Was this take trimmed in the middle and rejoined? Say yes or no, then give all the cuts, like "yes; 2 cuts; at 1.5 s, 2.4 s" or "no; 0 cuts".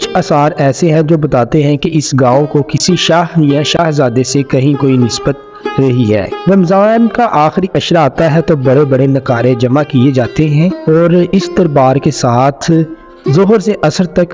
yes; 2 cuts; at 6.3 s, 10.8 s